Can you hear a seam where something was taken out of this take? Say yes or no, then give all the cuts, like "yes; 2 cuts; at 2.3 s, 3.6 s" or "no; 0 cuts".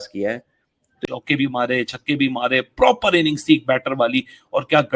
yes; 1 cut; at 0.9 s